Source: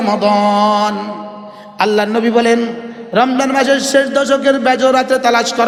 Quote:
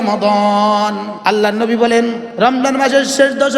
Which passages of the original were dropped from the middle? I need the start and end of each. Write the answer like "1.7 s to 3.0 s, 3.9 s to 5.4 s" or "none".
1.1 s to 1.6 s, 2.8 s to 3.0 s